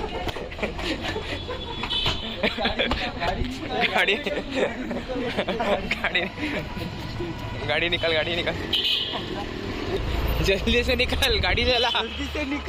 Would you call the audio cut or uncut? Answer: cut